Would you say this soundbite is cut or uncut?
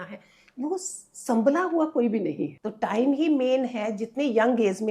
cut